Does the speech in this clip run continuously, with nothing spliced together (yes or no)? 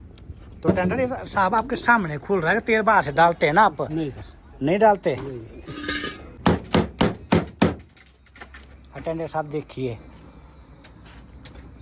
no